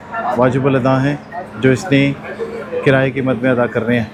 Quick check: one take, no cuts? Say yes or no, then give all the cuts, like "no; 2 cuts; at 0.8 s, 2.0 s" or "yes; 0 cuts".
yes; 0 cuts